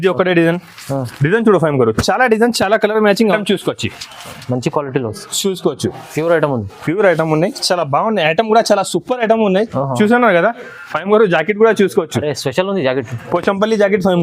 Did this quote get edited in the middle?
yes; 1 cut; at 3.4 s

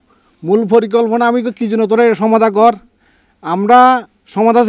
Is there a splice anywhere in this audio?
no; 0 cuts

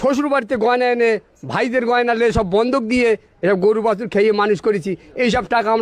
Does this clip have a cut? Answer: no; 0 cuts

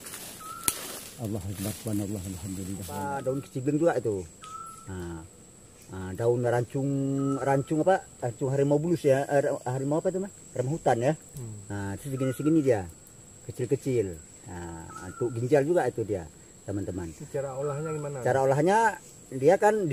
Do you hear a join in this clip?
yes; 1 cut; at 3.2 s

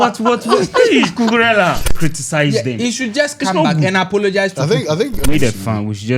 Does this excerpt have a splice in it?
yes; 2 cuts; at 1.9 s, 5.2 s

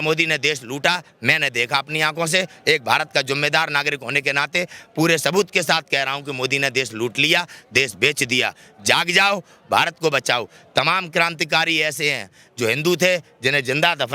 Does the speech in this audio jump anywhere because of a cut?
no; 0 cuts

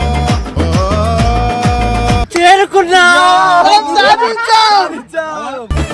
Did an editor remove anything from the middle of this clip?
yes; 1 cut; at 2.3 s

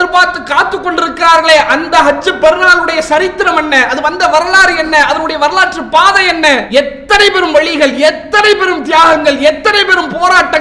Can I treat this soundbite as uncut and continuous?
no; 1 cut; at 6.6 s

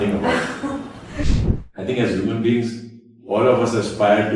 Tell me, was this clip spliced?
yes; 1 cut; at 1.3 s

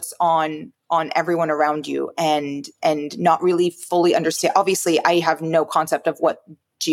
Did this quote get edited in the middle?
no; 0 cuts

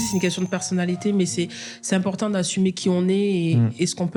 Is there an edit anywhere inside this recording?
no; 0 cuts

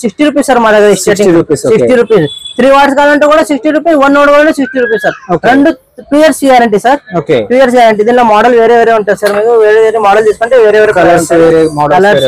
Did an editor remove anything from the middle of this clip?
no; 0 cuts

